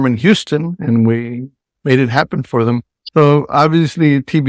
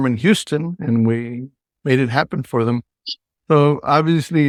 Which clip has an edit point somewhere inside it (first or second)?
first